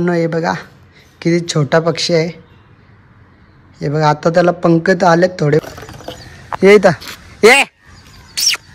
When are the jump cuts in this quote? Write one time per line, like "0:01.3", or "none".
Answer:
0:05.7